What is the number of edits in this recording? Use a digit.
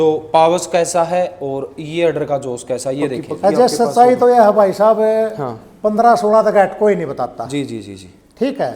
1